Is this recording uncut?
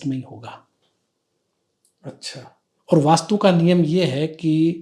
yes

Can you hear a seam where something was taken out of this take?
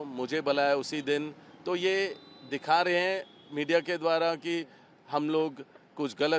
no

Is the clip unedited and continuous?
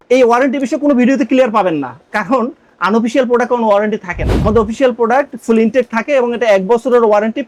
yes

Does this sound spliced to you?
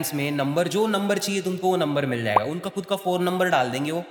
no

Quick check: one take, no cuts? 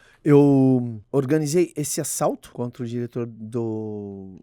no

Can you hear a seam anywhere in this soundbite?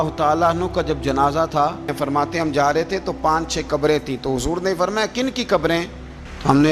yes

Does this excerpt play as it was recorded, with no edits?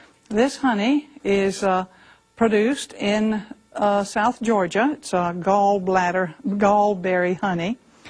yes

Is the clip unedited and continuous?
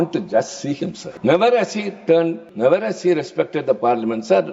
no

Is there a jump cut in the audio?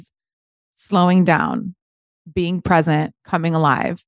no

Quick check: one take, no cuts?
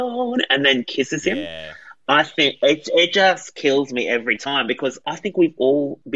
no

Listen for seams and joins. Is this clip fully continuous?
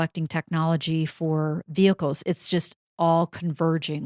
yes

